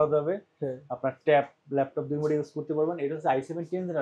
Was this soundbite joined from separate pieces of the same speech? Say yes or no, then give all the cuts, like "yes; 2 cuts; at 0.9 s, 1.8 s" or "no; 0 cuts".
no; 0 cuts